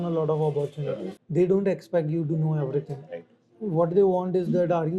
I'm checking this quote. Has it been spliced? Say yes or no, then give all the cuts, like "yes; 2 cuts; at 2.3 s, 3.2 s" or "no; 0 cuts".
yes; 1 cut; at 1.1 s